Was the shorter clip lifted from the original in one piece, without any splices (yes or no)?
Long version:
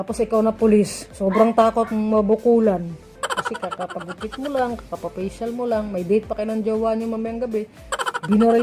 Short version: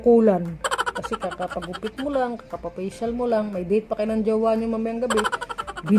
yes